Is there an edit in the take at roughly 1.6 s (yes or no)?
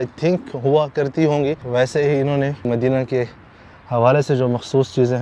yes